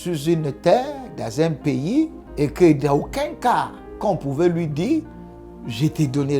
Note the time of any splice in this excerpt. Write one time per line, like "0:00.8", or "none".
0:02.2